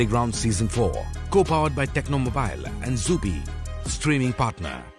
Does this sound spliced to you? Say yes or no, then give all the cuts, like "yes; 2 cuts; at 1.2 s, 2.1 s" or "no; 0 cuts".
no; 0 cuts